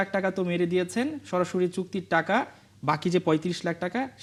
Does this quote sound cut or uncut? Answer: uncut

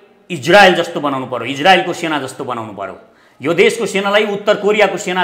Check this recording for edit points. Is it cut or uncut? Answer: uncut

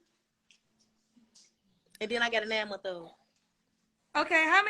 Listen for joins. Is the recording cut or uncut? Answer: uncut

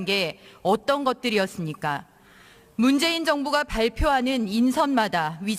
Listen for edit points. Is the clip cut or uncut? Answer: uncut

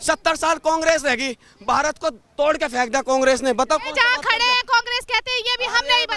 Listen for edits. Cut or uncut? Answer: uncut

